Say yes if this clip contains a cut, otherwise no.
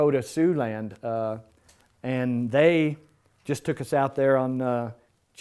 no